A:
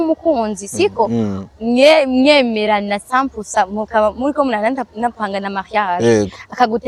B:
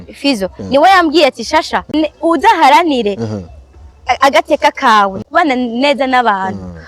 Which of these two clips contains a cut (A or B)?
B